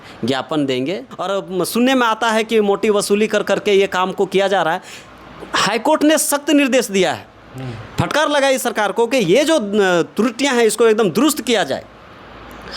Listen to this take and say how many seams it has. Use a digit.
1